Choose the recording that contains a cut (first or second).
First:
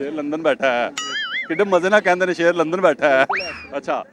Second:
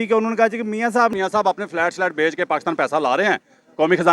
second